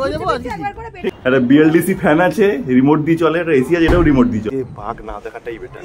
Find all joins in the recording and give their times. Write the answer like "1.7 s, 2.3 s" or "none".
1.2 s, 4.5 s